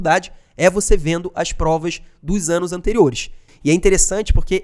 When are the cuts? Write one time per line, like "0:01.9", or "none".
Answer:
0:03.5